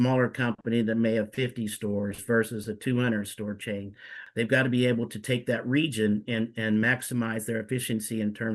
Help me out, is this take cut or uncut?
cut